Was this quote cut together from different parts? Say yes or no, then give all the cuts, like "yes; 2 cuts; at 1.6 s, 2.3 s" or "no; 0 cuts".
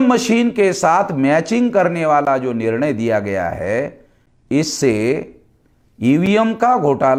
no; 0 cuts